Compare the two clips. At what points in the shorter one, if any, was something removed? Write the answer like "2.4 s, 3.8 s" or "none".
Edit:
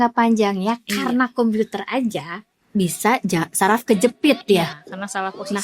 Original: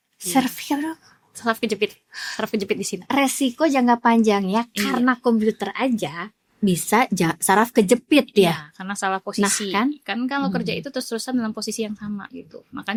none